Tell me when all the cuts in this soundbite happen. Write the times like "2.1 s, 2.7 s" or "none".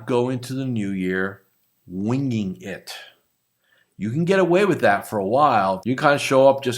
5.8 s